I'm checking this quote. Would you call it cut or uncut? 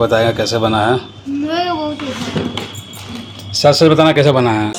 uncut